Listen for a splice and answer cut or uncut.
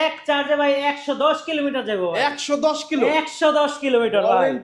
uncut